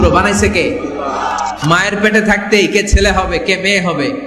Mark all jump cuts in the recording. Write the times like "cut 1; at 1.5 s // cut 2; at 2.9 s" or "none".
cut 1; at 1.6 s

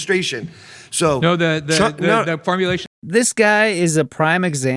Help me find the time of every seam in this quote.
cut 1; at 2.9 s

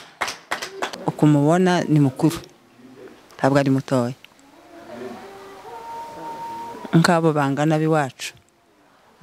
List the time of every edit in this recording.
cut 1; at 0.9 s

